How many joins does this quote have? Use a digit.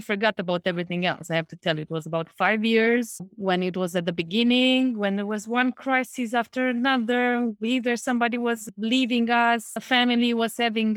0